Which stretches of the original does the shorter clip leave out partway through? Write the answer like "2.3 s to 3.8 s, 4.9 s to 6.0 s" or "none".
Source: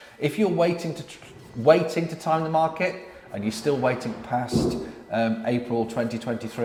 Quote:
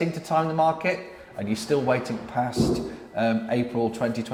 none